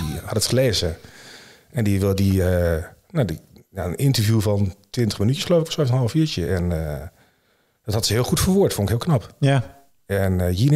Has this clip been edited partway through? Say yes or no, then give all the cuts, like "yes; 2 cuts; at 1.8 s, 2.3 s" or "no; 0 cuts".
no; 0 cuts